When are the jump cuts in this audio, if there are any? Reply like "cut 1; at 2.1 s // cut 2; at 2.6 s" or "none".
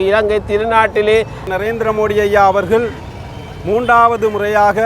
cut 1; at 1.4 s